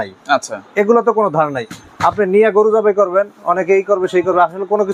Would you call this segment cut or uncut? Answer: uncut